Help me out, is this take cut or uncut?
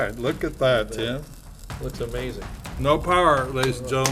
cut